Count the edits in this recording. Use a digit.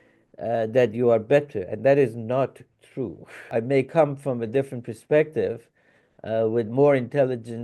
1